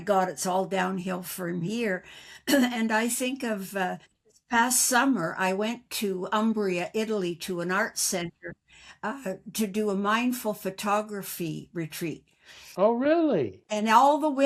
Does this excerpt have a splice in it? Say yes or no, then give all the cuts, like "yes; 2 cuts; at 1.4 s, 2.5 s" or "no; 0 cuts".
no; 0 cuts